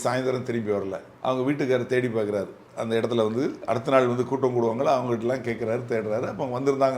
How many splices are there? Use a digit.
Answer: 1